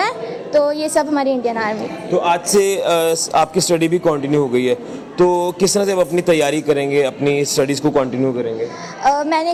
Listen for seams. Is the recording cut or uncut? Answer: uncut